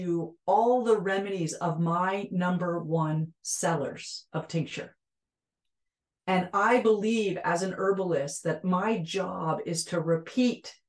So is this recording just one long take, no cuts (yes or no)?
yes